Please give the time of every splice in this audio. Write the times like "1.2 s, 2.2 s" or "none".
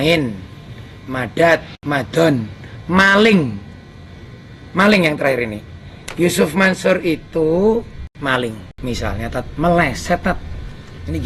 8.7 s